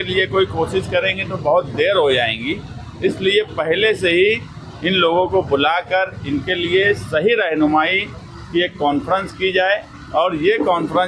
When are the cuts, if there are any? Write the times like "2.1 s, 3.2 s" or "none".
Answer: none